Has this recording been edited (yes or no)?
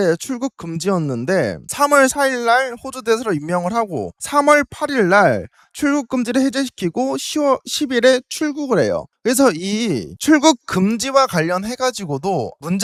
no